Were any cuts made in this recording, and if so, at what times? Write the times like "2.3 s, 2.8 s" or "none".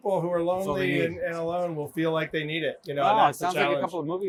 none